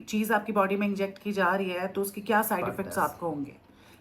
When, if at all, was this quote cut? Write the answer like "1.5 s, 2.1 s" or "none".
none